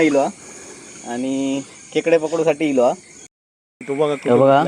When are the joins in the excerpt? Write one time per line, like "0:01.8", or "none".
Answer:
0:03.1